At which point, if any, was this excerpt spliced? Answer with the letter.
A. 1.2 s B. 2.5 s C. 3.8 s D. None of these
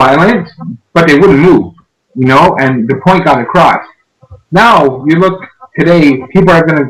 D